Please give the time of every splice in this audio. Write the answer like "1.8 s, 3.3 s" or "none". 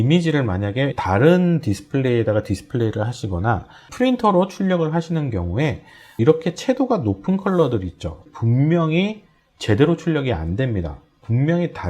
0.9 s, 3.9 s, 6.2 s, 8.2 s